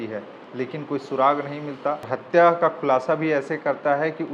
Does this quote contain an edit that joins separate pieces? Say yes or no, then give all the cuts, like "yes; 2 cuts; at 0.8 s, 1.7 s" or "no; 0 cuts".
yes; 1 cut; at 2.1 s